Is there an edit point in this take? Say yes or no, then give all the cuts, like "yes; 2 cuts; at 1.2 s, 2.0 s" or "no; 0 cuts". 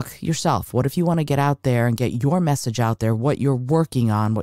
no; 0 cuts